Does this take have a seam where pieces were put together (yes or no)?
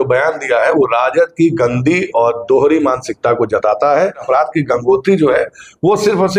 yes